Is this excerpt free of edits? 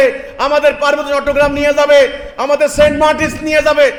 yes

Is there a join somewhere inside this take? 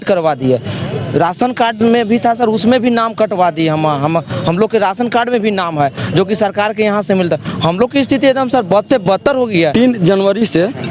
yes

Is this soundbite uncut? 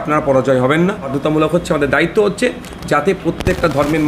no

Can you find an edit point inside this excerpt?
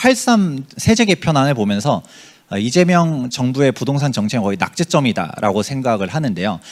no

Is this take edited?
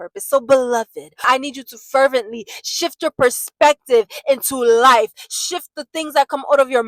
yes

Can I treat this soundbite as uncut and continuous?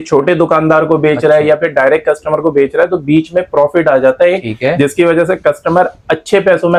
yes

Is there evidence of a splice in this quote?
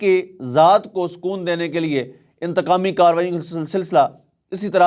no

